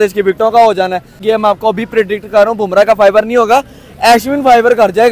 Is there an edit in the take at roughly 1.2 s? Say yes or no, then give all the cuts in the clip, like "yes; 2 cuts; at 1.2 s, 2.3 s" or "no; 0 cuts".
yes; 1 cut; at 1.2 s